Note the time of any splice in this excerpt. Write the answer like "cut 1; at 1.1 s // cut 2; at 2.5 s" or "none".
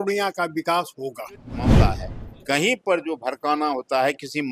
cut 1; at 1.8 s